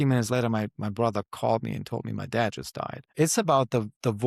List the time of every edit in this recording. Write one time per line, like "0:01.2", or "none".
0:03.0